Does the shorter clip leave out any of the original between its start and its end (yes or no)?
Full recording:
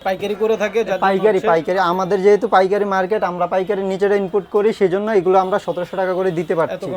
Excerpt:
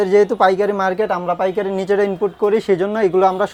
no